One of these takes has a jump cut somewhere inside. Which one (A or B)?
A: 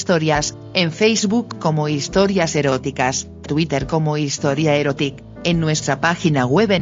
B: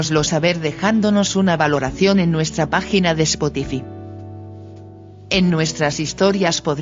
B